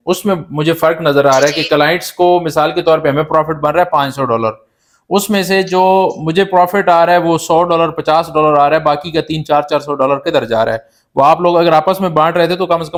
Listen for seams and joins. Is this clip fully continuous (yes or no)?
yes